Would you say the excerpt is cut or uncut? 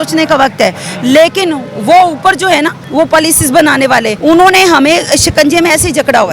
cut